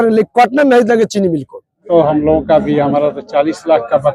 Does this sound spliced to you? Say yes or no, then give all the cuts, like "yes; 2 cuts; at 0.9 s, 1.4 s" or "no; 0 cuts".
yes; 1 cut; at 1.9 s